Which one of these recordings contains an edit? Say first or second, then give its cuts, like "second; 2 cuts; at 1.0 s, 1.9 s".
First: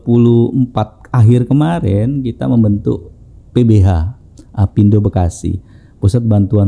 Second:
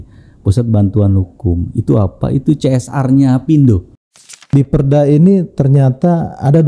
second; 1 cut; at 4.4 s